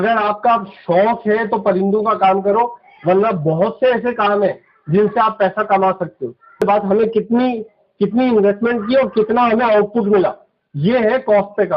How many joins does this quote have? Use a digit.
1